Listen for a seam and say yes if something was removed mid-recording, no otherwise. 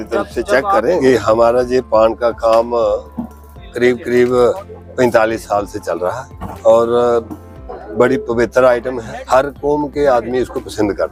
no